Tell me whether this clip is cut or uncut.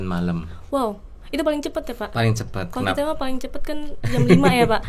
uncut